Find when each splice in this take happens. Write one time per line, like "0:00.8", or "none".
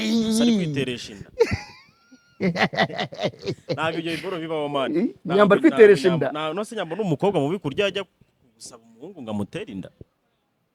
none